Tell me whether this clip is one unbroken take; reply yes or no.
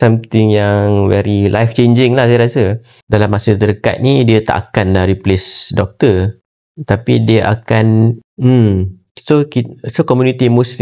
no